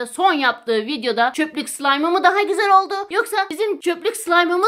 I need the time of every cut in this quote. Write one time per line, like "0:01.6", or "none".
0:01.3
0:03.6